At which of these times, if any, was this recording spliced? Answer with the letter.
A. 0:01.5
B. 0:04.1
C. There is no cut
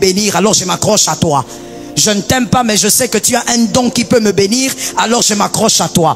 C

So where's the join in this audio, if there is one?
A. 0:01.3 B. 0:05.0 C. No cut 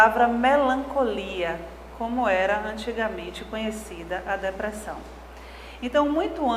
A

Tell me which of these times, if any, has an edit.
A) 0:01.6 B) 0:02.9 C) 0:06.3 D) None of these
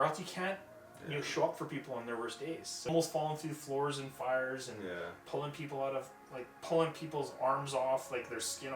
B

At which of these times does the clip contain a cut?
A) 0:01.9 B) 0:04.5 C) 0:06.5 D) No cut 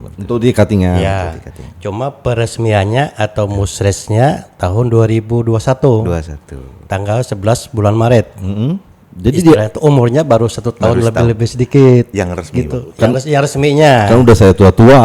D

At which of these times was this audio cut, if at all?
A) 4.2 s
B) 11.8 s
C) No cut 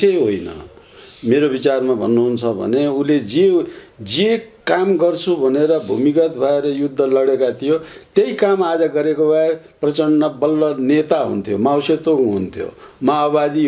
C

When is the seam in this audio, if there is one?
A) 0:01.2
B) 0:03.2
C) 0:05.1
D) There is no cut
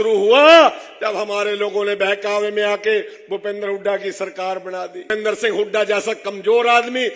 C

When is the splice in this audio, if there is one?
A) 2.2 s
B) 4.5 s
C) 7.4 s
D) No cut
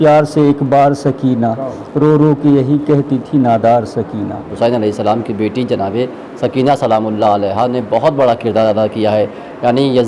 B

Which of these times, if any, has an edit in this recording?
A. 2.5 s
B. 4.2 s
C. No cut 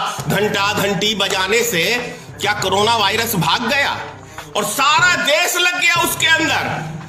C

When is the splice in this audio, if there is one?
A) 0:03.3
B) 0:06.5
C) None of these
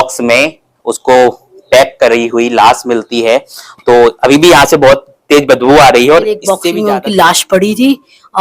B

